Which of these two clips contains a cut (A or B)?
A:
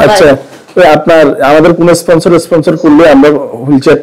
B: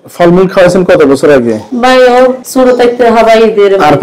B